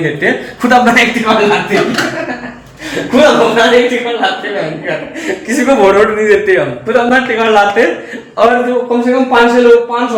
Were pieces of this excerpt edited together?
no; 0 cuts

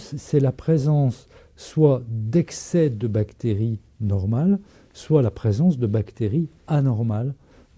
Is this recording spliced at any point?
no; 0 cuts

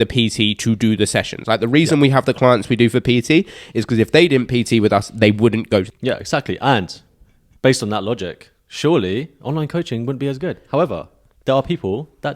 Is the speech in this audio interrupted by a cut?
yes; 1 cut; at 5.9 s

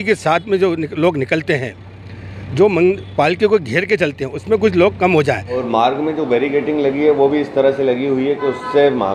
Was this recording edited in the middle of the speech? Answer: yes; 1 cut; at 5.5 s

